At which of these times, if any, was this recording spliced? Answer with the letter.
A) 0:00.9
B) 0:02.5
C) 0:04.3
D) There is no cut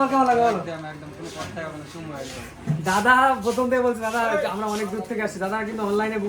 D